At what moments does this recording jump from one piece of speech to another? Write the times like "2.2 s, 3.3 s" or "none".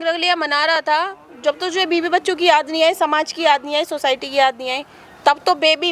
none